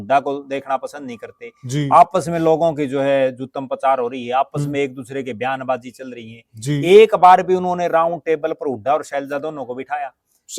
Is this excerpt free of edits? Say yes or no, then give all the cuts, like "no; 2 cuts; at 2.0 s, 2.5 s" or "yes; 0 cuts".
yes; 0 cuts